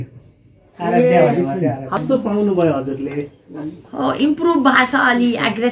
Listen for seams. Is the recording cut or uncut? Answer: cut